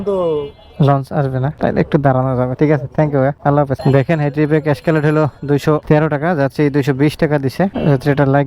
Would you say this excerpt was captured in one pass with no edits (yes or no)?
yes